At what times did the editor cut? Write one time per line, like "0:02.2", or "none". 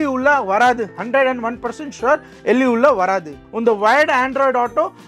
0:03.3

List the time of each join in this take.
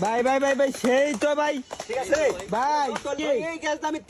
0:03.1

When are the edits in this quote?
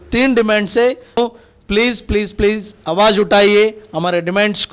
0:01.2

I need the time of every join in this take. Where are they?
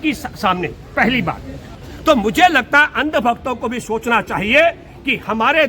0:01.7

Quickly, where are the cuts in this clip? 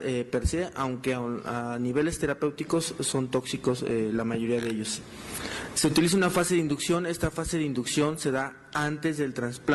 0:02.4

